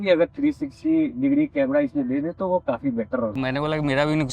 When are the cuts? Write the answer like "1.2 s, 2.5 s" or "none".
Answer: 3.4 s